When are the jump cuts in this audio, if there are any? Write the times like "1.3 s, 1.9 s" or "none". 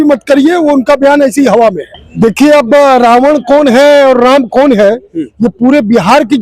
2.0 s